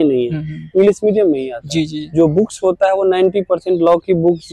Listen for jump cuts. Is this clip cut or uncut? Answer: uncut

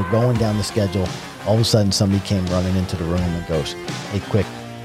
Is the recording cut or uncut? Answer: uncut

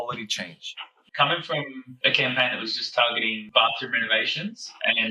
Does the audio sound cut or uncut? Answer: cut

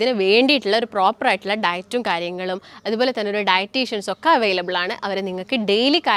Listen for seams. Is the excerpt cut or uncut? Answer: uncut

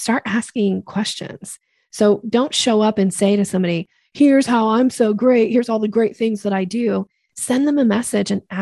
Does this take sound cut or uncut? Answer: uncut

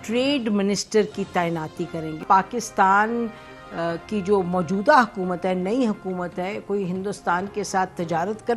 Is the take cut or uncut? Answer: cut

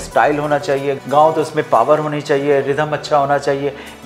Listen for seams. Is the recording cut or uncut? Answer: cut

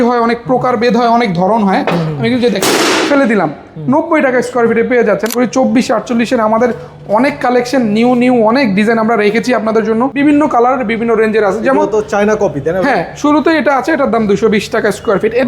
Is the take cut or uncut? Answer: cut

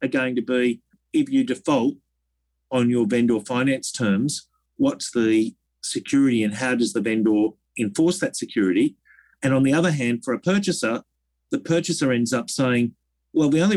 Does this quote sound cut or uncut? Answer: cut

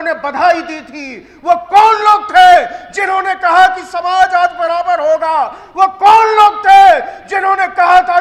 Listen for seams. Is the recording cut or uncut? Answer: uncut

